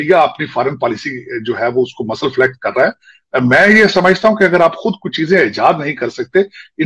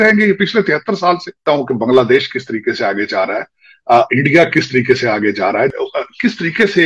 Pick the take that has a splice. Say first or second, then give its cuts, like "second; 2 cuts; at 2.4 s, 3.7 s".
second; 2 cuts; at 1.4 s, 5.7 s